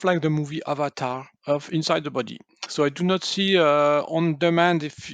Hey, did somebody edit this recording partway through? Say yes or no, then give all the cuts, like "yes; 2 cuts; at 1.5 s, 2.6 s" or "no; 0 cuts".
yes; 1 cut; at 1.3 s